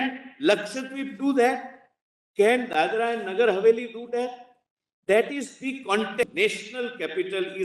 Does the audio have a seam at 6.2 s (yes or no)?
yes